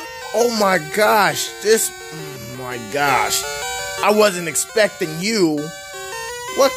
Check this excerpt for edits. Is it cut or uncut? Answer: uncut